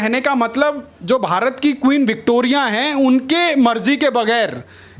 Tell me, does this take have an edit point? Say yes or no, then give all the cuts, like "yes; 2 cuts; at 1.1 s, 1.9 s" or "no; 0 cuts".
no; 0 cuts